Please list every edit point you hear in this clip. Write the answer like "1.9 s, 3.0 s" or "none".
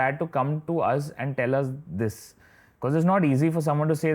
none